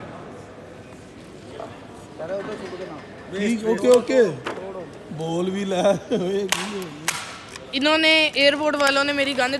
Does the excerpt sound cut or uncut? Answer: uncut